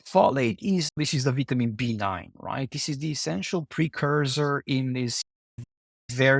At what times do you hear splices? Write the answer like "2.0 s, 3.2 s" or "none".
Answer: 1.0 s